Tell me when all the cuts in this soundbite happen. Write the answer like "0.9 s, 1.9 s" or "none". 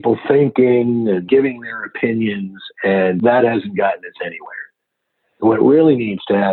1.2 s, 3.2 s